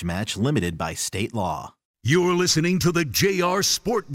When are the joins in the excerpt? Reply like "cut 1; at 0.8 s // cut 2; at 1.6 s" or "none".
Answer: cut 1; at 2.0 s